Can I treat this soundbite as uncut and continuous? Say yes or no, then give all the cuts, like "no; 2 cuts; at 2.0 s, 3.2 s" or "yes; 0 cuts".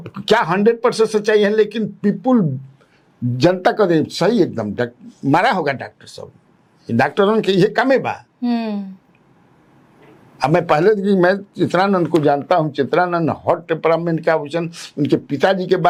yes; 0 cuts